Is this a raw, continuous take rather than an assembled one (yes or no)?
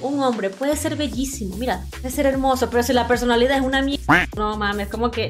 no